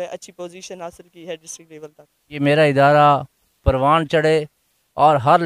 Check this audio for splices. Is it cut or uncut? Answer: cut